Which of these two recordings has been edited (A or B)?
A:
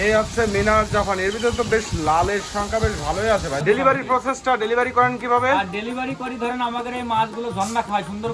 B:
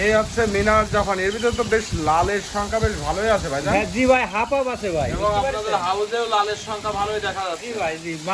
A